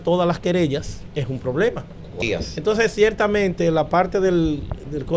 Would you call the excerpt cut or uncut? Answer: cut